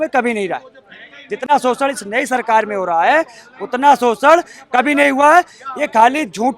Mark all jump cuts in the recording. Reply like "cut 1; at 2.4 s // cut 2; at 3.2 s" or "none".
none